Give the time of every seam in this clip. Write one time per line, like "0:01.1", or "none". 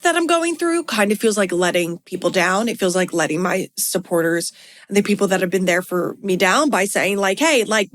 none